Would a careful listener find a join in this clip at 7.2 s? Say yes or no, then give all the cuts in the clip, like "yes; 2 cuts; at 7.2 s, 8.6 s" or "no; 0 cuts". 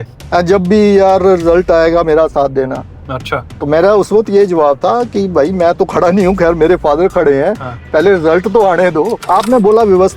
no; 1 cut; at 9.2 s